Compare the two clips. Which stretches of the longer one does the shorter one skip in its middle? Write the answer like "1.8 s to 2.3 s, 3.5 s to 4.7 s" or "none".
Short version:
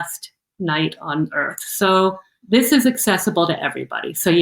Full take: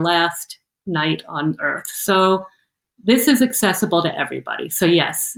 2.6 s to 2.9 s